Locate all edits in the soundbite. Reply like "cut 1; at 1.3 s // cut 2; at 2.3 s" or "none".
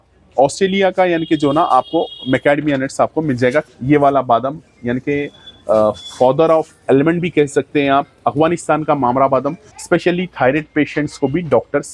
cut 1; at 3.7 s // cut 2; at 9.6 s